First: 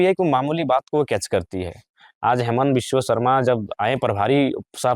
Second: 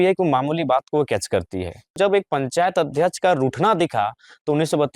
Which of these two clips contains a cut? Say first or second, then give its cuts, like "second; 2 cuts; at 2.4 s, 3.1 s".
second; 1 cut; at 1.9 s